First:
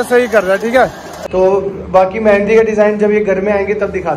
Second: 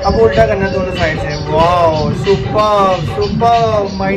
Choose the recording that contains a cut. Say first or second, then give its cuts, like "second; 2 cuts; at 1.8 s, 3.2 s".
first; 1 cut; at 1.1 s